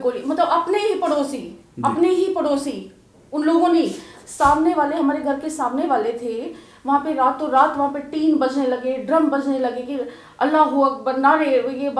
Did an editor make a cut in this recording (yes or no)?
no